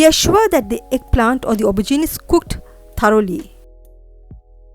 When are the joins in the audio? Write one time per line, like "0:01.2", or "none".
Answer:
0:03.5